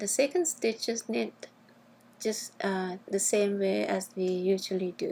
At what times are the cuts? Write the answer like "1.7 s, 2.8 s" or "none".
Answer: none